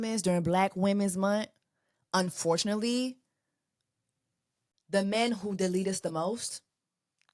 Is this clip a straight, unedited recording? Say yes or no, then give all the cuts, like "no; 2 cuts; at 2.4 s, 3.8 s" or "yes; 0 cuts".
yes; 0 cuts